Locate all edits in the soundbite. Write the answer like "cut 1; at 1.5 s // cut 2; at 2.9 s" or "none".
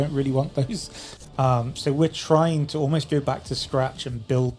cut 1; at 1.1 s